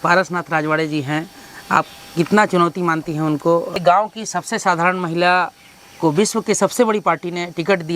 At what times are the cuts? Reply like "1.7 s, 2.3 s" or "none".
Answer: 3.7 s